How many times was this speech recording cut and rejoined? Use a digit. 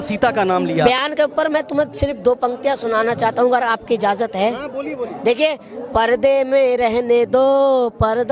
1